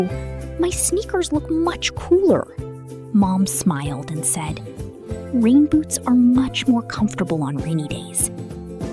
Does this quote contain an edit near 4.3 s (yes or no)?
no